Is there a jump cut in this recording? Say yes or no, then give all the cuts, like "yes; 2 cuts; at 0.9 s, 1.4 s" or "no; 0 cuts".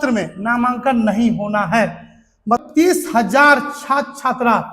yes; 1 cut; at 2.6 s